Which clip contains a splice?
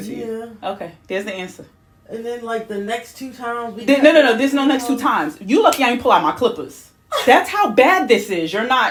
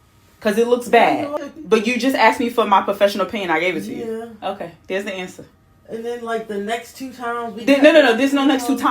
second; 1 cut; at 1.3 s

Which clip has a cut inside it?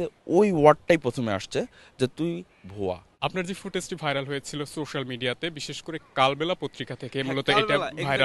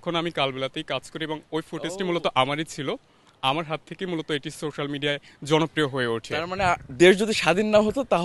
first; 1 cut; at 3.2 s

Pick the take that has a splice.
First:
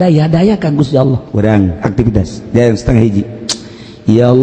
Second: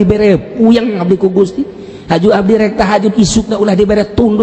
first; 1 cut; at 1.2 s

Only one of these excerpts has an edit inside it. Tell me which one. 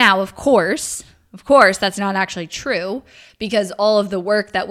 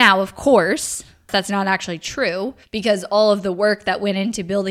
second; 2 cuts; at 1.3 s, 2.6 s

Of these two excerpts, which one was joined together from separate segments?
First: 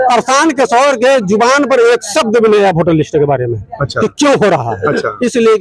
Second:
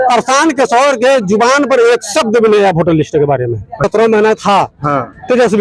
second; 1 cut; at 3.8 s

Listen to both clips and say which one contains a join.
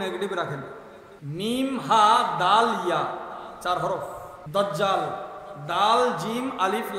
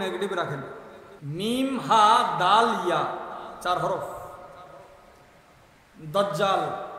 first; 1 cut; at 4.3 s

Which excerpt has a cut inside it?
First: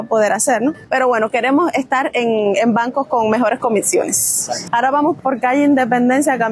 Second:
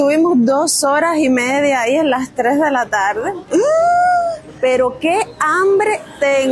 first; 2 cuts; at 0.8 s, 4.6 s

